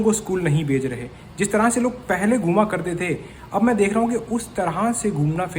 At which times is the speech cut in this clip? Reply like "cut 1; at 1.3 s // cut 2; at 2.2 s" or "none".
none